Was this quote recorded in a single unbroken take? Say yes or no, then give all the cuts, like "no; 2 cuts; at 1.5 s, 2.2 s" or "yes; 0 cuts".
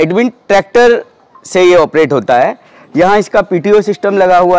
yes; 0 cuts